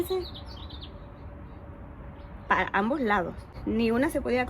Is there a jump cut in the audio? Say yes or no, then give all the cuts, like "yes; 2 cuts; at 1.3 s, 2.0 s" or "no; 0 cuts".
yes; 1 cut; at 3.5 s